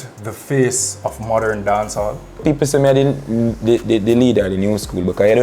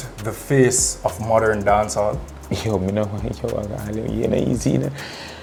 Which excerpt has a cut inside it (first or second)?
first